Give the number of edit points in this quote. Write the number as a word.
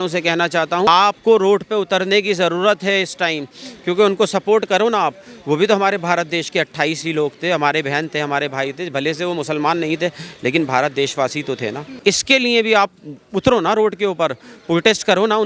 two